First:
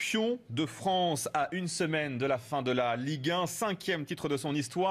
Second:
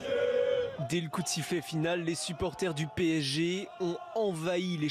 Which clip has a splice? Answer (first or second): second